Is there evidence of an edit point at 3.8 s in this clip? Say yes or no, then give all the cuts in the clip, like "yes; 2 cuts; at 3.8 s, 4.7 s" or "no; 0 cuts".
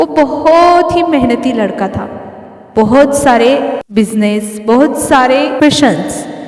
yes; 2 cuts; at 3.8 s, 5.6 s